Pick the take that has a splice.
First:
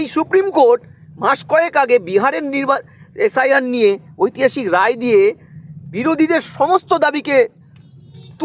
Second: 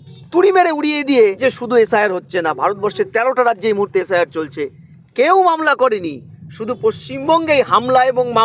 second; 1 cut; at 1.4 s

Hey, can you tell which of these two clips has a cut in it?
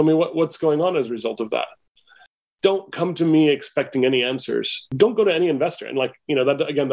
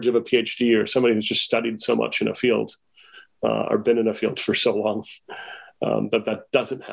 first; 1 cut; at 4.9 s

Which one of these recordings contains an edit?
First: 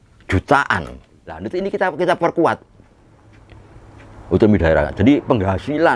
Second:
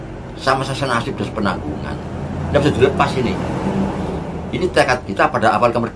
first; 1 cut; at 1.5 s

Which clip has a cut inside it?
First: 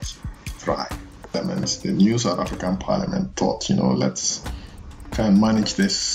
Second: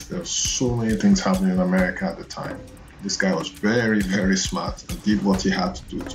first; 1 cut; at 1.3 s

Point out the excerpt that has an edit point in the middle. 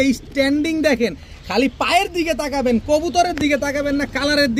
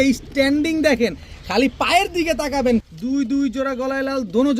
second; 1 cut; at 2.8 s

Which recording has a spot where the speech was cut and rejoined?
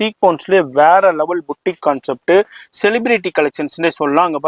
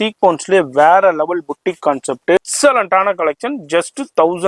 second; 1 cut; at 2.4 s

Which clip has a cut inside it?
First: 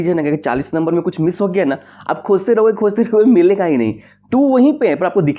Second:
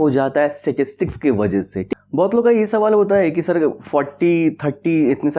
second; 1 cut; at 1.9 s

